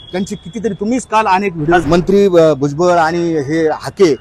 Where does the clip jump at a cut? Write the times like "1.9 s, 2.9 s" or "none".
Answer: 1.8 s